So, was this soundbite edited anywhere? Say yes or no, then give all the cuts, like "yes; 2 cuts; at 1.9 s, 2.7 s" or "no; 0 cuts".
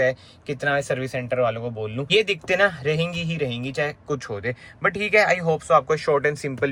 no; 0 cuts